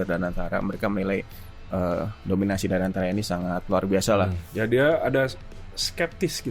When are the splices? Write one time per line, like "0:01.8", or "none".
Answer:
0:04.4